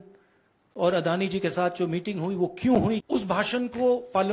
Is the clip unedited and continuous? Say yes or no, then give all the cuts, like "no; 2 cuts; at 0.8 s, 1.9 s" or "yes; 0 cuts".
no; 1 cut; at 3.0 s